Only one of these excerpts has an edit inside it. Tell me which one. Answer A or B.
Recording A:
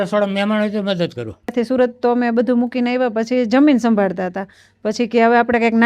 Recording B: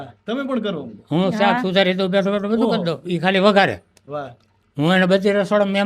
A